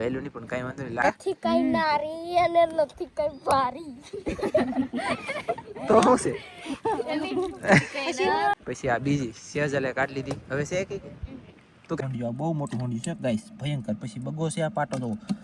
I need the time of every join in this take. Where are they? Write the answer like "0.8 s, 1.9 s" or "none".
1.0 s, 8.5 s, 12.0 s